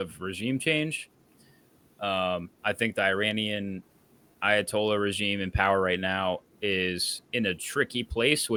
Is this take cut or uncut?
uncut